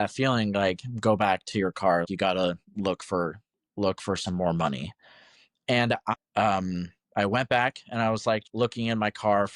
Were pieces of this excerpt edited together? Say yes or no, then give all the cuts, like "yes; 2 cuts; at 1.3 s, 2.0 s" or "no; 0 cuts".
yes; 2 cuts; at 6.1 s, 8.5 s